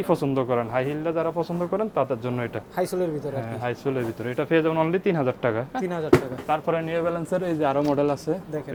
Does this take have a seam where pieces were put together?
no; 0 cuts

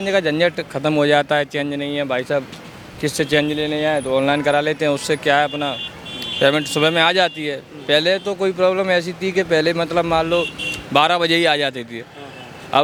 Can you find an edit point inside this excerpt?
no; 0 cuts

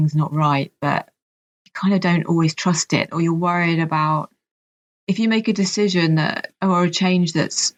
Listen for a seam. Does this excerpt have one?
no; 0 cuts

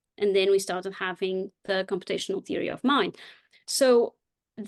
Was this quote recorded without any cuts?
yes; 0 cuts

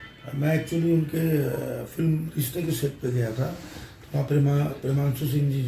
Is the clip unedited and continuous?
yes; 0 cuts

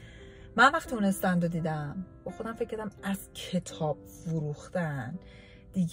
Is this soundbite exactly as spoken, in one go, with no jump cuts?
yes; 0 cuts

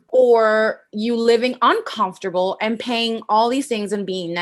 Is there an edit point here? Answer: no; 0 cuts

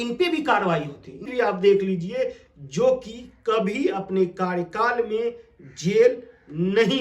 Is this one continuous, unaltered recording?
no; 1 cut; at 1.3 s

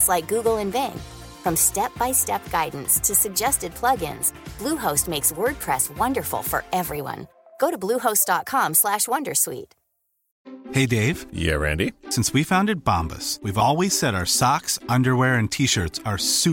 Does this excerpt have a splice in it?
no; 0 cuts

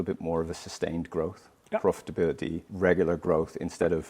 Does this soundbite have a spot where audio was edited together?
yes; 1 cut; at 2.6 s

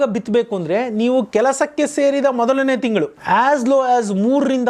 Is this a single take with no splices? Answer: no; 1 cut; at 3.1 s

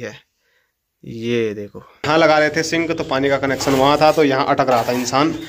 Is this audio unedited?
no; 1 cut; at 2.1 s

